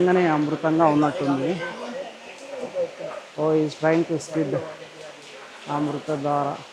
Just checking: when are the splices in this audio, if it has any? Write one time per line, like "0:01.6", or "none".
none